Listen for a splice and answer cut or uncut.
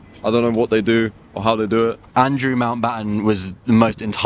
cut